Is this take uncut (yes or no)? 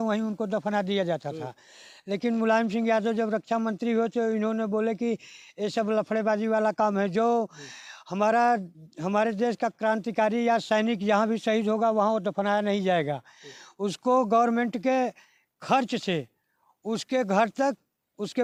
yes